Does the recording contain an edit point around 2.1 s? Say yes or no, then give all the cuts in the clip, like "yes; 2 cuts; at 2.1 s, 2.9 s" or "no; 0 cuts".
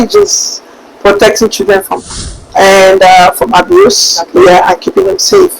yes; 1 cut; at 2.1 s